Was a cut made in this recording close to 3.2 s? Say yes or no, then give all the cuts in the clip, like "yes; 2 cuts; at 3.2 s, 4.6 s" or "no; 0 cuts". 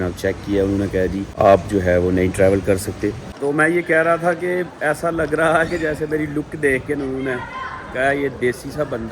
yes; 2 cuts; at 1.3 s, 3.2 s